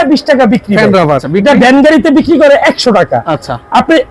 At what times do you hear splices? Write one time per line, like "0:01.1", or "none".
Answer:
0:01.2